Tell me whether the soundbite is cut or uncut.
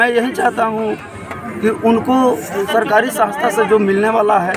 uncut